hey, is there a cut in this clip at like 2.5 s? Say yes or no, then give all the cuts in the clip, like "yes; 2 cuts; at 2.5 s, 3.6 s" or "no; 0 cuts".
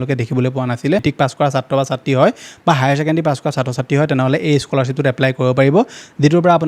no; 1 cut; at 1.0 s